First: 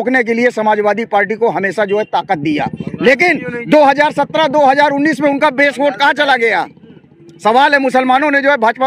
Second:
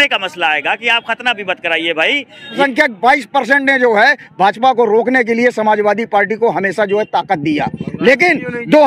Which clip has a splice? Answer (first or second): second